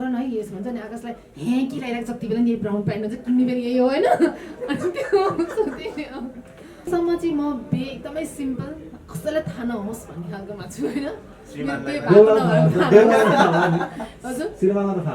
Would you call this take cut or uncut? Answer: cut